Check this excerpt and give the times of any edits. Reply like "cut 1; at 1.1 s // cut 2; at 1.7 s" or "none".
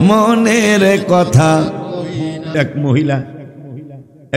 cut 1; at 2.5 s